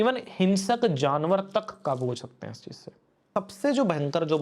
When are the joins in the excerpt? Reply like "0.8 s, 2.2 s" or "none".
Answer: 3.2 s